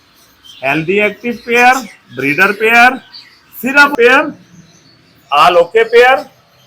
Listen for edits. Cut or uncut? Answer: cut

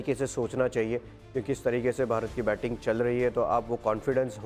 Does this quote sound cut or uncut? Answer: uncut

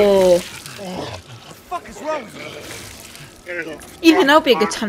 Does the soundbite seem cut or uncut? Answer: uncut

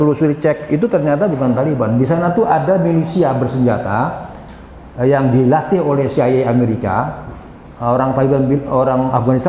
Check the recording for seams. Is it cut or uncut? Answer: uncut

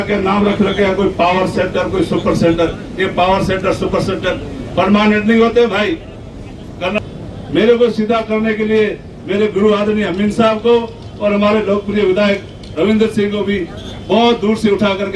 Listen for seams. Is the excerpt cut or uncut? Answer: cut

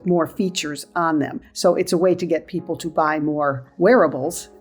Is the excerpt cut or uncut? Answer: cut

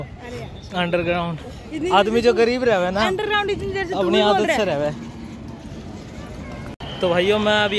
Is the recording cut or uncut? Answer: cut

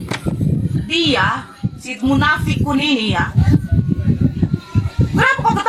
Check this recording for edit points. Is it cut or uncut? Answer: cut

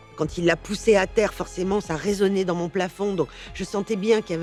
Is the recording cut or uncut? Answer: uncut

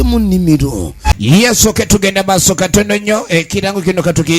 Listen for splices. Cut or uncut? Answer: cut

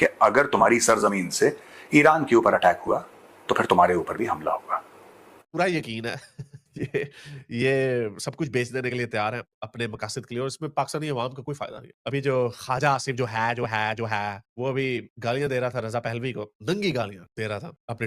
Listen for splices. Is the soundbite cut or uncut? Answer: cut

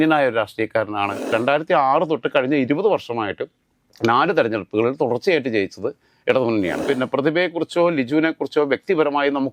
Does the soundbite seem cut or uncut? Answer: cut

